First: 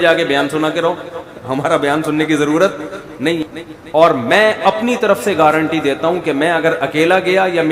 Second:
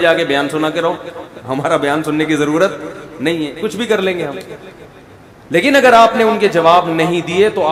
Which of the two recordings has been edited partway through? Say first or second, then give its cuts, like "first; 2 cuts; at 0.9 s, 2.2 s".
first; 1 cut; at 3.5 s